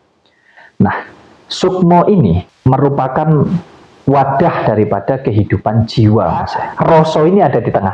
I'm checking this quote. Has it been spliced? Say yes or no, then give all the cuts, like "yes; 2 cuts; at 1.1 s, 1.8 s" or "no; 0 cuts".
yes; 2 cuts; at 2.5 s, 6.6 s